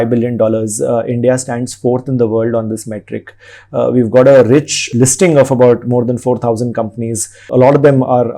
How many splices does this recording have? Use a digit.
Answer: 0